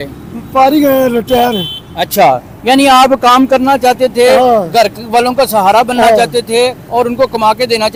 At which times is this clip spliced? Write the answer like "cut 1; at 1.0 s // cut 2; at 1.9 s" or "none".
none